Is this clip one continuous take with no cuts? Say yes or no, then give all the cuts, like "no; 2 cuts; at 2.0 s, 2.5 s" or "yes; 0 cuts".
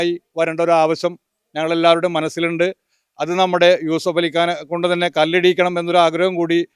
yes; 0 cuts